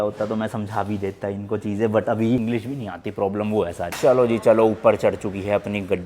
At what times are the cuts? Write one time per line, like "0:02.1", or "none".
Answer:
0:02.4
0:03.9